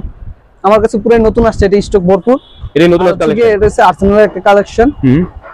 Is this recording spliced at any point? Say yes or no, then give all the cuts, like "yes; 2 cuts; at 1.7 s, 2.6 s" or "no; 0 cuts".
yes; 1 cut; at 3.3 s